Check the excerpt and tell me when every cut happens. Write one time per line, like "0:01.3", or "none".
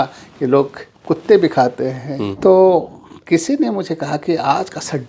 0:02.3